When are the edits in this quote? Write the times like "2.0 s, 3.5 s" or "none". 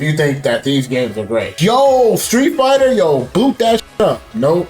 1.5 s